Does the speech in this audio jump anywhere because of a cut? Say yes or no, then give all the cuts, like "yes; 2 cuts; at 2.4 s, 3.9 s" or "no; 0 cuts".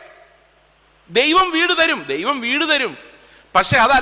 no; 0 cuts